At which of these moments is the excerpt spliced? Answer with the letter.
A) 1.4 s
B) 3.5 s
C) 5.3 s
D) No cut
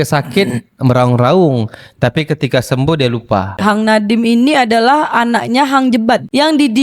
B